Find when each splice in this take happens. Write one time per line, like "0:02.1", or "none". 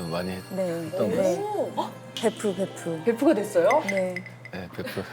0:01.9